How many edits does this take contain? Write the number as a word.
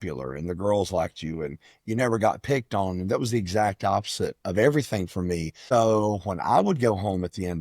one